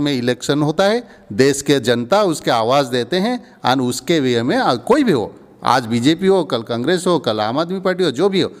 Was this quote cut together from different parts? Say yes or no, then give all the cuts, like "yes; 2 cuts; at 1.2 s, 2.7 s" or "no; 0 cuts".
no; 0 cuts